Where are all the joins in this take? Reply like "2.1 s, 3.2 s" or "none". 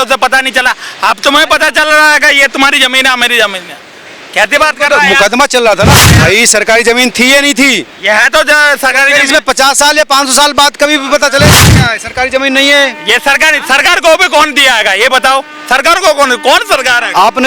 6.2 s, 11.6 s